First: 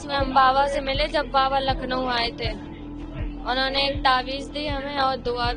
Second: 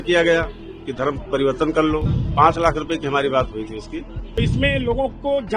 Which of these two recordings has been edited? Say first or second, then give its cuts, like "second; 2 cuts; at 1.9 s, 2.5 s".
second; 2 cuts; at 2.1 s, 4.4 s